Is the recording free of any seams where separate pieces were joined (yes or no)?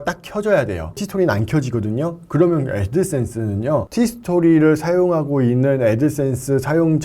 no